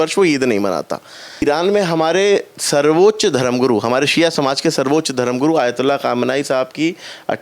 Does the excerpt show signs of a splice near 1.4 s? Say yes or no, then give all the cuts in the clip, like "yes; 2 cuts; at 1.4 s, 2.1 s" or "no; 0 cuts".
yes; 1 cut; at 1.4 s